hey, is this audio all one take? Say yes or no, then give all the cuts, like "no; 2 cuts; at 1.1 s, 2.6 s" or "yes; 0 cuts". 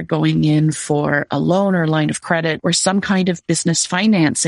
no; 1 cut; at 2.6 s